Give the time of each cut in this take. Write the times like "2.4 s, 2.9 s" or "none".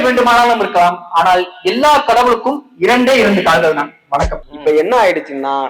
4.4 s